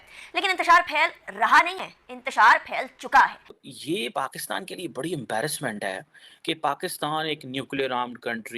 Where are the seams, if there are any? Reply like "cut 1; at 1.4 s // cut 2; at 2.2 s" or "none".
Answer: cut 1; at 3.6 s